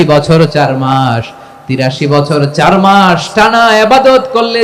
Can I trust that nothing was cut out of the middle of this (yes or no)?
yes